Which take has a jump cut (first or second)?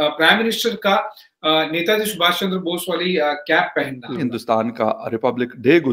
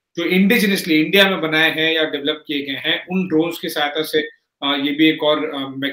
first